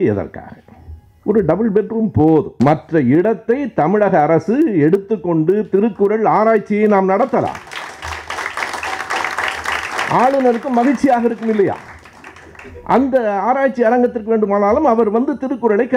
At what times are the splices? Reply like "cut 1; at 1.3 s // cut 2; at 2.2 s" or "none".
cut 1; at 2.5 s